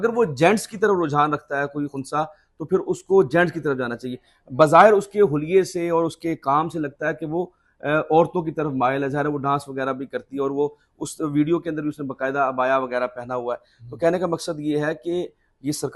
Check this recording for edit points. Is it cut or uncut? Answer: cut